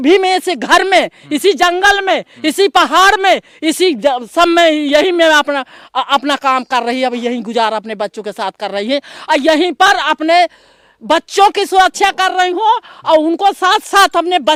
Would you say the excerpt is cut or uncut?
uncut